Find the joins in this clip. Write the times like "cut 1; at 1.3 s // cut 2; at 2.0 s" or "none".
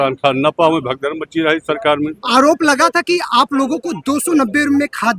cut 1; at 2.1 s